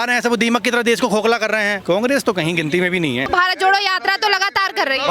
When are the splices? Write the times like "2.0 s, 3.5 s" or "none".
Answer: 1.7 s, 3.2 s